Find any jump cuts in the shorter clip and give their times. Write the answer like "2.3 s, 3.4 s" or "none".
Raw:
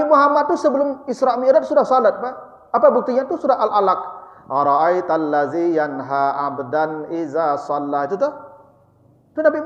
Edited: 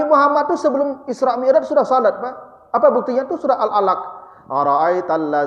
none